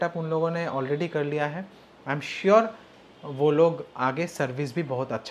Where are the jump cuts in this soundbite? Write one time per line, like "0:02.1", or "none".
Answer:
none